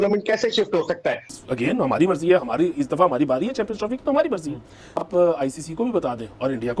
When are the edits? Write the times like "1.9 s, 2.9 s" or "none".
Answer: 1.3 s